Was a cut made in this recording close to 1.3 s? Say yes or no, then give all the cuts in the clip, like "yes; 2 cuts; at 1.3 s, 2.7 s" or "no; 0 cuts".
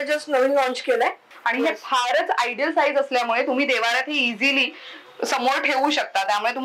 yes; 1 cut; at 1.3 s